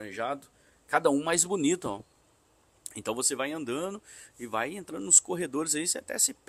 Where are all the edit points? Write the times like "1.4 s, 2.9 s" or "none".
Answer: none